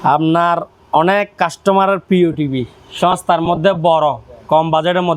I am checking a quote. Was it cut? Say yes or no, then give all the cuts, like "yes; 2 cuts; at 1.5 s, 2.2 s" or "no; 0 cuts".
no; 0 cuts